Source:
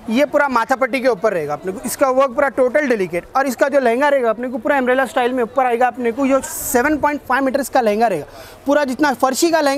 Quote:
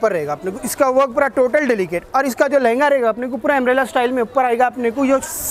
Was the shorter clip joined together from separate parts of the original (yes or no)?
no